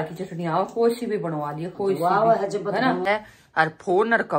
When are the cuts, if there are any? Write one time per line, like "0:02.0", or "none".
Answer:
0:03.0